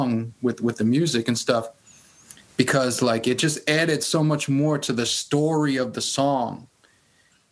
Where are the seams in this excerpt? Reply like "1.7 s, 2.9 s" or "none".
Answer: none